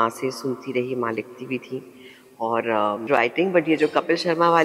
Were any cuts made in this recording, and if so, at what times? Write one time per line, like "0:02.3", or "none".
0:03.1